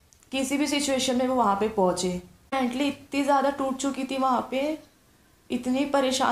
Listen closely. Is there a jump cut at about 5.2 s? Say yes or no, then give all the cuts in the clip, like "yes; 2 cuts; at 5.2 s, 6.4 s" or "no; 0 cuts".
no; 1 cut; at 2.5 s